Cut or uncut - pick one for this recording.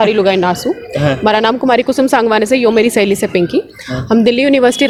uncut